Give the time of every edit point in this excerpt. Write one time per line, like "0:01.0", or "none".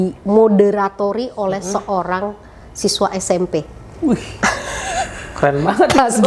none

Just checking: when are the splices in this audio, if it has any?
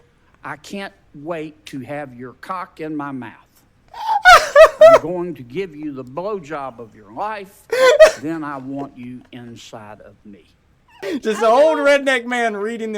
0:11.0

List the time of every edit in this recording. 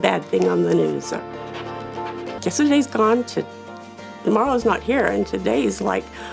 0:02.3

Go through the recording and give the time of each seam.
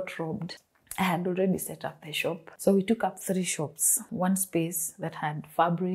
0:02.4
0:04.0

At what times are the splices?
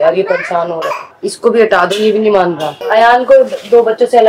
0:01.1
0:02.8

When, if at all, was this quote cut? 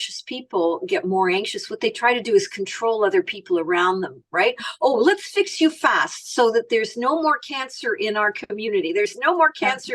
none

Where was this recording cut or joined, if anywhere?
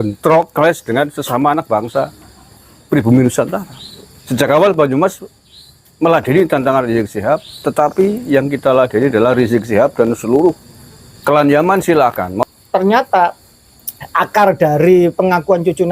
0:12.3

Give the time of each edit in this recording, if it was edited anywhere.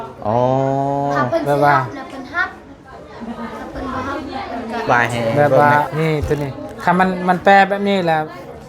0:05.9

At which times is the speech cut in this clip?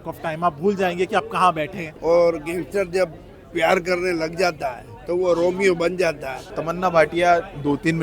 0:01.8
0:06.6

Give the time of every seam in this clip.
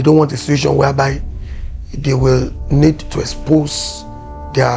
none

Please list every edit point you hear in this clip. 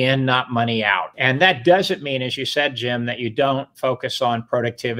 0:01.1

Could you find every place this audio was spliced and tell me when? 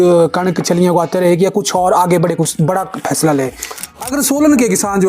0:03.9

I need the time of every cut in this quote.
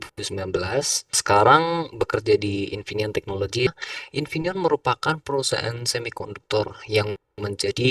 0:01.2
0:03.8

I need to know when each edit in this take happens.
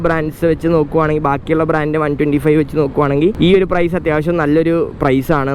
none

